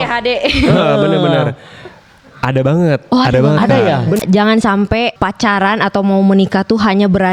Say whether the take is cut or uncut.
cut